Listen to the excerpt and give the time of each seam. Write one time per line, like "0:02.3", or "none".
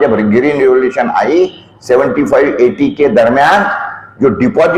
none

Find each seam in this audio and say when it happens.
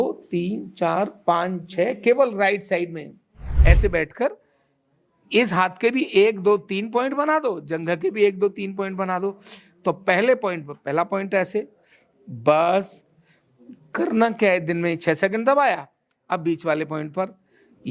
0:03.5

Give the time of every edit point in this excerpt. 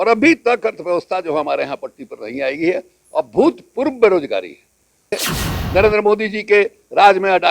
0:05.1

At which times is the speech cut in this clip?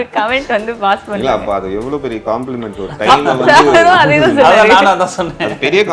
none

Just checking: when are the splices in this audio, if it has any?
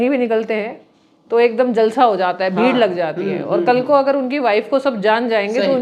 none

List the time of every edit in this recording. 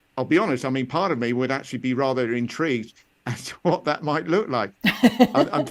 none

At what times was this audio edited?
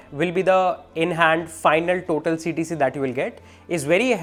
none

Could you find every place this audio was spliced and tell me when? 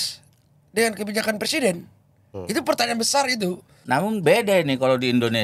0:03.7

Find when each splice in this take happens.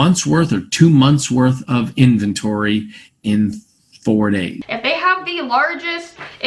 0:04.6

